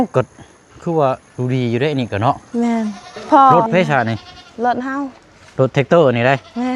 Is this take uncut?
no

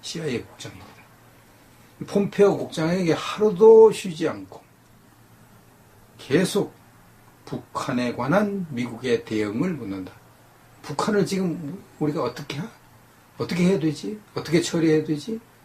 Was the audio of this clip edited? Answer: yes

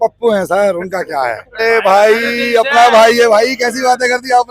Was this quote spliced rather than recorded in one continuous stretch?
yes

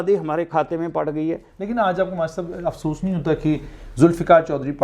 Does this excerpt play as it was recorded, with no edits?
yes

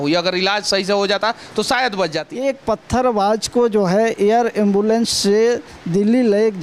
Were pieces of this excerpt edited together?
yes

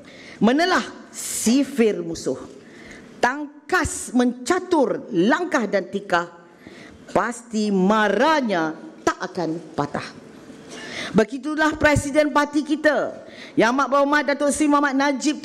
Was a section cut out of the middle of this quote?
yes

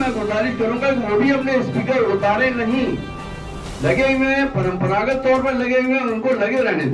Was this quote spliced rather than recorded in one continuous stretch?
no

